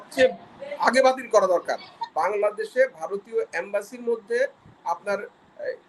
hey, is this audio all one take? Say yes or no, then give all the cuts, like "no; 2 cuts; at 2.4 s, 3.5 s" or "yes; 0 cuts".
no; 1 cut; at 2.0 s